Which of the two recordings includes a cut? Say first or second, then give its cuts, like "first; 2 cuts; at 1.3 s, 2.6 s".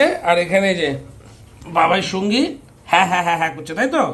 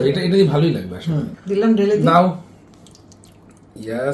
second; 1 cut; at 1.3 s